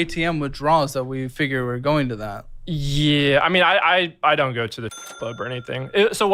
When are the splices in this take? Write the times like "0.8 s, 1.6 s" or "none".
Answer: 4.7 s